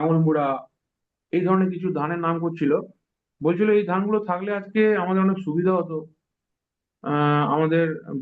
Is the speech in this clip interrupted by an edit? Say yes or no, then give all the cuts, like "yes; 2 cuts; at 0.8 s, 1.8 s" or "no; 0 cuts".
no; 0 cuts